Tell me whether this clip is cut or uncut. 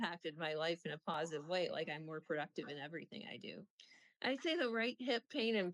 cut